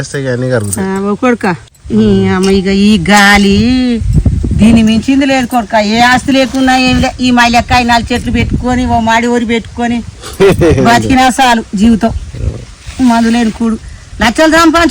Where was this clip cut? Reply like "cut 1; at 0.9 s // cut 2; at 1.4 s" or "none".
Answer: cut 1; at 1.7 s

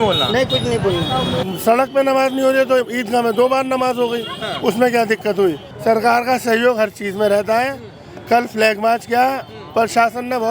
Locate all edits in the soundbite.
cut 1; at 1.5 s // cut 2; at 5.7 s

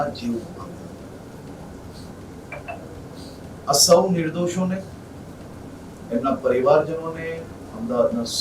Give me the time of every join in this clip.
none

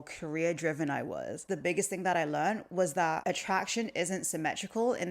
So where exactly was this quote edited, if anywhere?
cut 1; at 1.5 s // cut 2; at 3.2 s

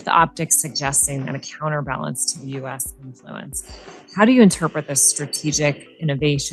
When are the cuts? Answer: none

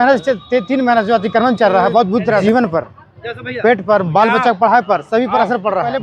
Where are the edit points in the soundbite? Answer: cut 1; at 2.4 s

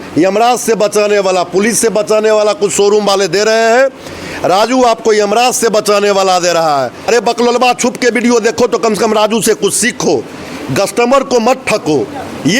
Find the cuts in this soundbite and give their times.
cut 1; at 7.1 s

